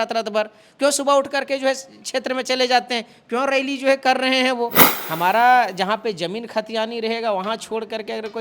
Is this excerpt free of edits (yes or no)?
no